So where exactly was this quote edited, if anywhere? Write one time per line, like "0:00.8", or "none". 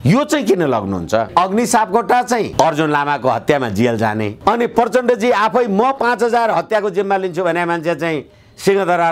0:01.3
0:02.5
0:04.3